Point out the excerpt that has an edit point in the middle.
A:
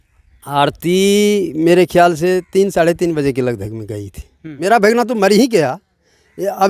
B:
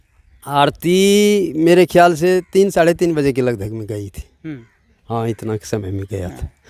A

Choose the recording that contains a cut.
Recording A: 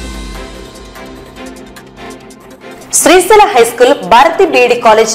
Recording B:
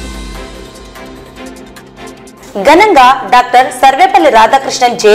B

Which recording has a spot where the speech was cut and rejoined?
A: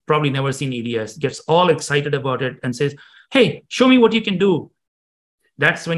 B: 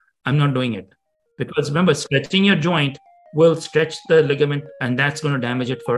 B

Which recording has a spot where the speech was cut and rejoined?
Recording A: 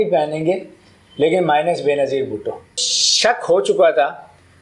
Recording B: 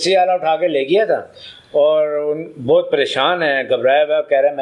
A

